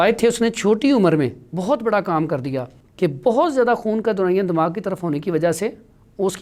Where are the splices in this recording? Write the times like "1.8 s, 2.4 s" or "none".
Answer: 2.8 s